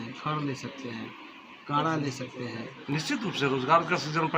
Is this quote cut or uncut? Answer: cut